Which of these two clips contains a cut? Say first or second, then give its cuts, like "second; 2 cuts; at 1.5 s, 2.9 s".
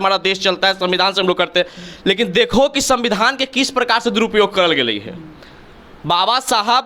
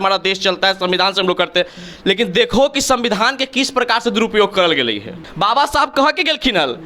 second; 1 cut; at 5.2 s